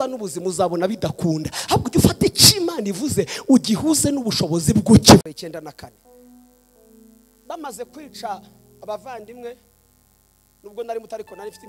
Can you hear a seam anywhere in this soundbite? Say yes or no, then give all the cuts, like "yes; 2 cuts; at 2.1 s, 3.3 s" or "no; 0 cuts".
yes; 1 cut; at 5.2 s